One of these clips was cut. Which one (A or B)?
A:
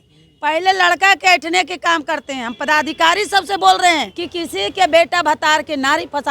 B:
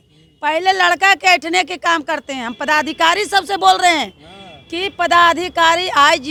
A